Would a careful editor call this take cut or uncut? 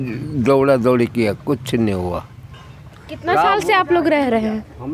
uncut